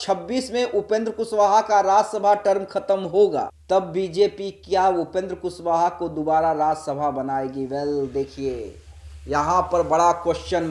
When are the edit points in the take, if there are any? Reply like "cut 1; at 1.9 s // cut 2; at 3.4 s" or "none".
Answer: none

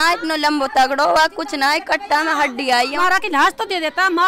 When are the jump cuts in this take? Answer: cut 1; at 3.0 s

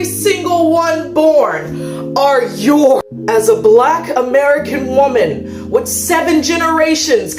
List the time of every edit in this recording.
none

